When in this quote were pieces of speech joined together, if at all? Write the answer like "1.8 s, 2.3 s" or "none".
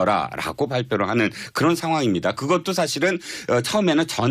none

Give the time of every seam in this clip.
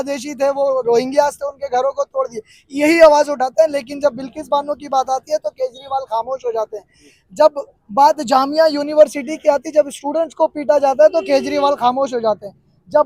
none

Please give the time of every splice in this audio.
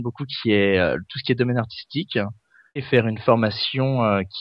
2.8 s

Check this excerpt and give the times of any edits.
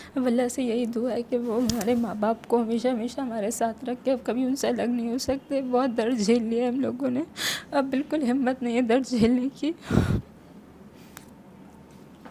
none

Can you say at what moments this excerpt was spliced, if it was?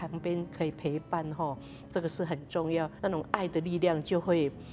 2.9 s

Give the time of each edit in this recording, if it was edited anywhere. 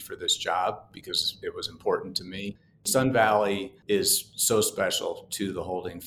2.9 s, 3.7 s

